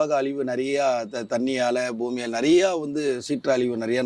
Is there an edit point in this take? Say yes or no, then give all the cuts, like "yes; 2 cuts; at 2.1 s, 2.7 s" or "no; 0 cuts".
no; 0 cuts